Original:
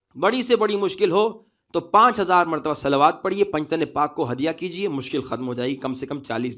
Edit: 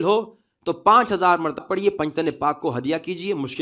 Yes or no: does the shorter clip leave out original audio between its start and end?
yes